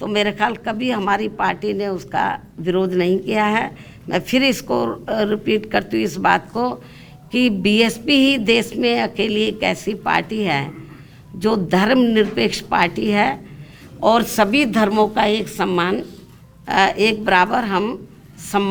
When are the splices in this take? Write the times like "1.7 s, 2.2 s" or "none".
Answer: none